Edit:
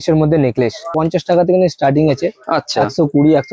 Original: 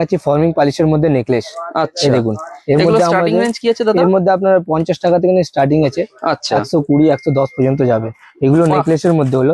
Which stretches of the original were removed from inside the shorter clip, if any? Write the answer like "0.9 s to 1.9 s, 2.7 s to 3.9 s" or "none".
1.6 s to 4.7 s